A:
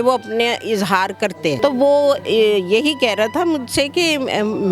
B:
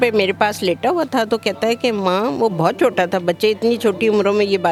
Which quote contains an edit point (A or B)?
A